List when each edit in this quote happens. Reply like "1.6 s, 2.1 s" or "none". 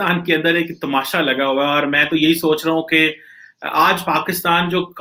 none